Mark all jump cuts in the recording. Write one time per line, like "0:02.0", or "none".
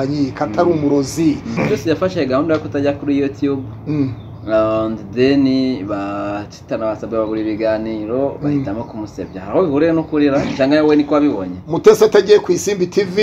0:01.5